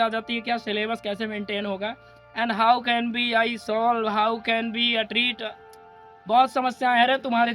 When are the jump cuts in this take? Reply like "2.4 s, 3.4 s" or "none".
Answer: none

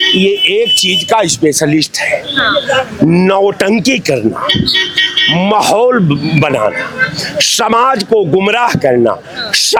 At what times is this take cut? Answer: none

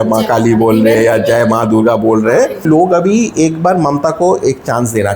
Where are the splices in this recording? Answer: 2.6 s

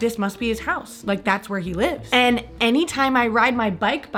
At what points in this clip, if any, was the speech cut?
none

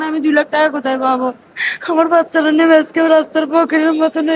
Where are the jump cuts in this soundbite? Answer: none

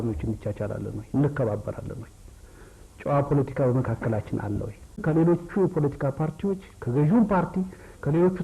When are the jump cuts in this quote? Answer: 5.0 s

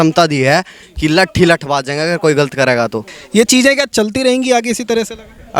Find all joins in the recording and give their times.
none

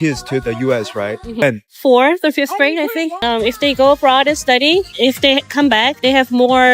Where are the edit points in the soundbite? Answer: 1.4 s, 3.2 s

